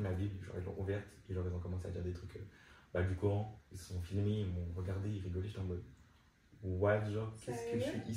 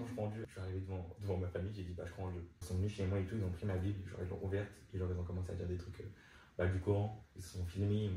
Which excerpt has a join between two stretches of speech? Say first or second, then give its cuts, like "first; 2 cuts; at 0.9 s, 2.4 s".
second; 1 cut; at 2.5 s